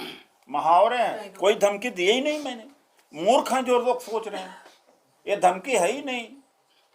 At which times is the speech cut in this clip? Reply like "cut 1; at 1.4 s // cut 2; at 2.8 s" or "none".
cut 1; at 1.2 s